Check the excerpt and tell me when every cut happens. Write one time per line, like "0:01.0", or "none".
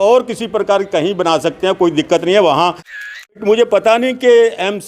0:03.4